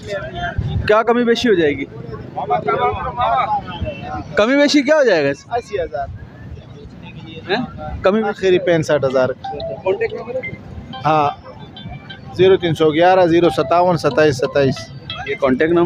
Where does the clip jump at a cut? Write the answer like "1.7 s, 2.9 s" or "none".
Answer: none